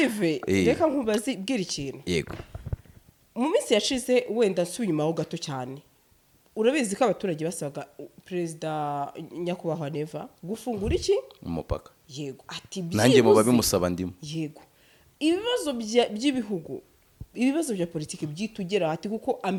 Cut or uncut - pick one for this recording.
uncut